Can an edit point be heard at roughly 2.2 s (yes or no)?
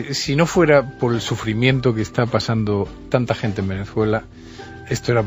yes